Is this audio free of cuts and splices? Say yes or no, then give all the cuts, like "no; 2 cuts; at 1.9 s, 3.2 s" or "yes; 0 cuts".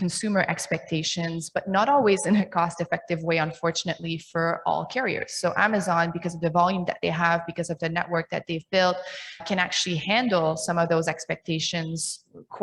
yes; 0 cuts